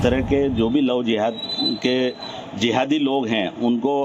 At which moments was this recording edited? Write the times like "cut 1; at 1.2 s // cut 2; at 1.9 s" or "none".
none